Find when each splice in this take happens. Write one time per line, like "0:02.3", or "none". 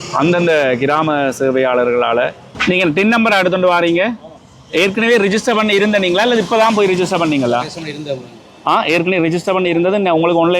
0:02.5